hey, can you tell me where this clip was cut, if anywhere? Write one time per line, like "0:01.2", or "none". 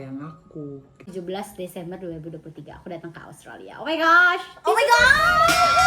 0:01.1